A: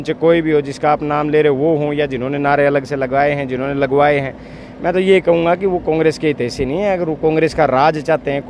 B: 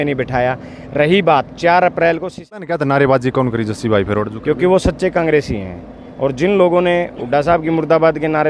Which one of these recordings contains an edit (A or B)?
B